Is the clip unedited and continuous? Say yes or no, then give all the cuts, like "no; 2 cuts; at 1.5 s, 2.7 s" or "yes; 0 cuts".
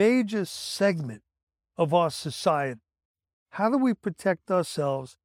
yes; 0 cuts